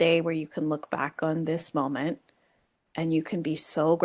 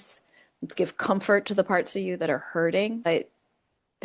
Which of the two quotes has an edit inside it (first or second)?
second